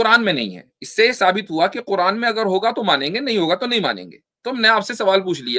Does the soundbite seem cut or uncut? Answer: uncut